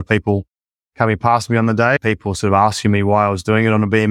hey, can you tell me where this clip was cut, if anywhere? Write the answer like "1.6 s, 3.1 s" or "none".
2.0 s

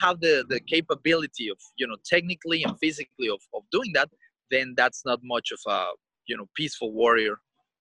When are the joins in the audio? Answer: none

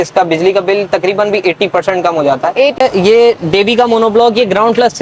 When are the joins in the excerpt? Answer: 2.8 s

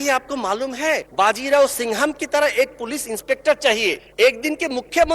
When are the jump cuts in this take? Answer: 1.1 s, 4.0 s

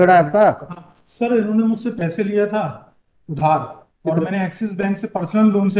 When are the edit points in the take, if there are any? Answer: none

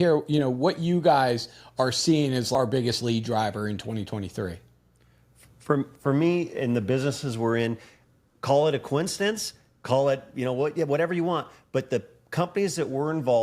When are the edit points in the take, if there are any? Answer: 2.5 s

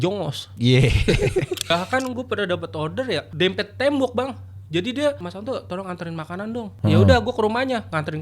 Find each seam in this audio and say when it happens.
1.7 s

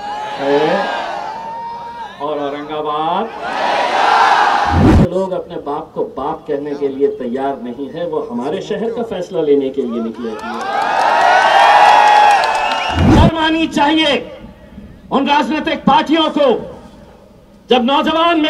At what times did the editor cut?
4.9 s, 13.0 s

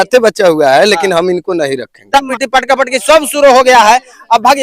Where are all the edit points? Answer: 2.1 s

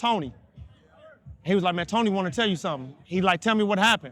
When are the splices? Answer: 3.0 s

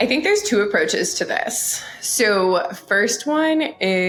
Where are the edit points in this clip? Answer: none

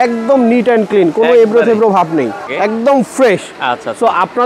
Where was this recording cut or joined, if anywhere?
2.5 s

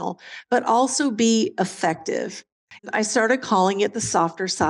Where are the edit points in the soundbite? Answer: 2.9 s

